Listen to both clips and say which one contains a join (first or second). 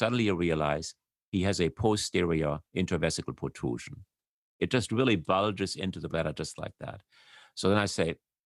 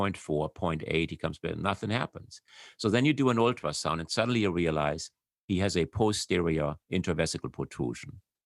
first